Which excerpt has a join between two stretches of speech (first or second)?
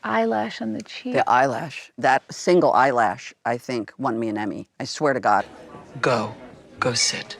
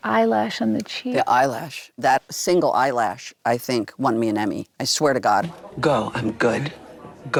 first